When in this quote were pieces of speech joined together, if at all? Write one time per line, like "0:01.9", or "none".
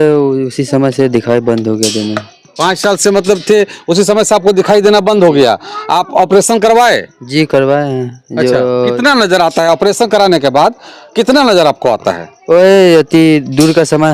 none

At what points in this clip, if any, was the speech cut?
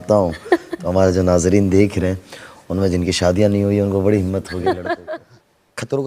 0:05.1

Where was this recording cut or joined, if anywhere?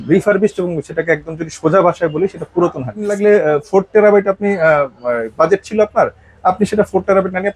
0:03.2

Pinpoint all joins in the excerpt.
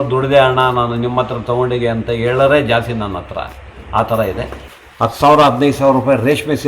0:04.6

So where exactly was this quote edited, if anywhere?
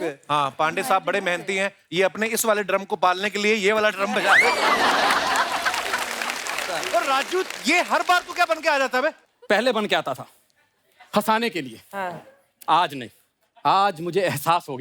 0:06.7

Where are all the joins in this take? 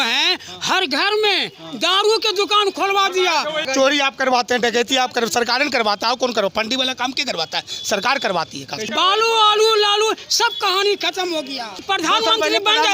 0:03.7
0:08.8
0:11.8

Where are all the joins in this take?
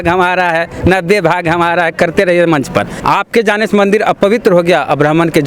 0:03.0

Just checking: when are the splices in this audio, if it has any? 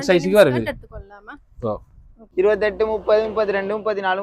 0:02.2

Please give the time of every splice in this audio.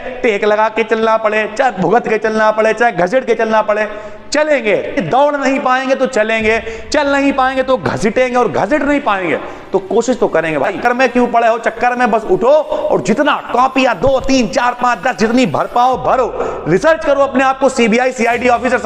0:05.0
0:10.7

